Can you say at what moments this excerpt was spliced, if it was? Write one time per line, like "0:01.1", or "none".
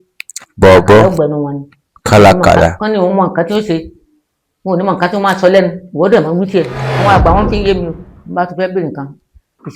0:06.8